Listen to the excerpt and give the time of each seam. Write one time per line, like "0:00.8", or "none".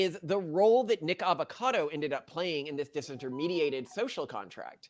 none